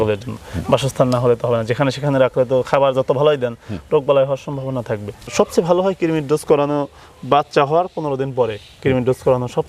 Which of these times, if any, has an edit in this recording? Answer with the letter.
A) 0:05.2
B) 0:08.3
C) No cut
A